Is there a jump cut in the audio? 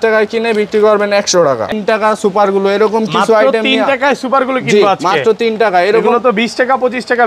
yes; 1 cut; at 1.7 s

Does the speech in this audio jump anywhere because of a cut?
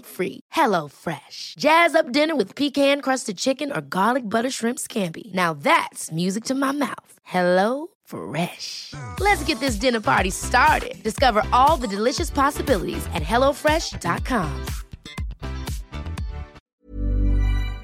yes; 1 cut; at 16.8 s

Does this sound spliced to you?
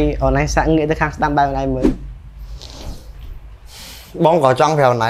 no; 0 cuts

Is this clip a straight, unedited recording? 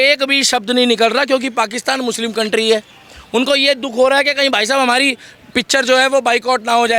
yes; 0 cuts

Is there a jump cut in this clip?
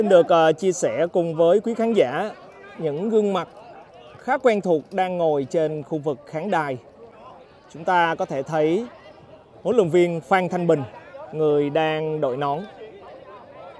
yes; 1 cut; at 7.2 s

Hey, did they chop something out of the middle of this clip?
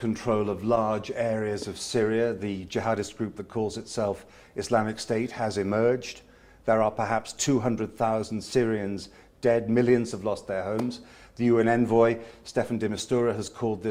no; 0 cuts

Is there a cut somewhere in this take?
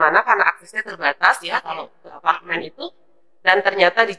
no; 0 cuts

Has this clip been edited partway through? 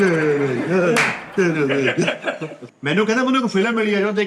yes; 1 cut; at 2.6 s

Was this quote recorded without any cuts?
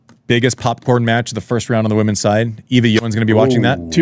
no; 1 cut; at 3.0 s

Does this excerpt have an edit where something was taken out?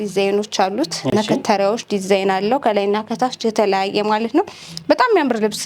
no; 0 cuts

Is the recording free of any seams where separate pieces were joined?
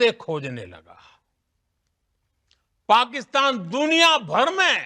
yes; 0 cuts

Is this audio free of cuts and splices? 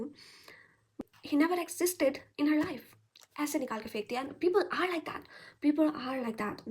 no; 1 cut; at 1.0 s

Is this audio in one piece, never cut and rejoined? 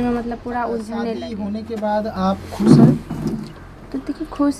no; 1 cut; at 1.3 s

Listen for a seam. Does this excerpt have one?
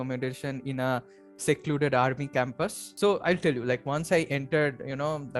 yes; 1 cut; at 2.8 s

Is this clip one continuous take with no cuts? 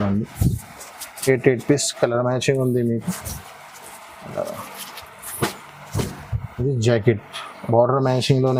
yes; 0 cuts

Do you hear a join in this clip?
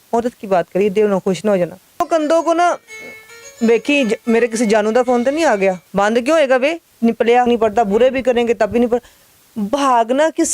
yes; 3 cuts; at 2.1 s, 5.8 s, 7.5 s

